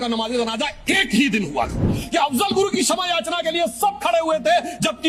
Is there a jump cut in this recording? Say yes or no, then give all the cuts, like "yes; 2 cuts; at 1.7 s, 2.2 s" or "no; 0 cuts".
yes; 1 cut; at 1.9 s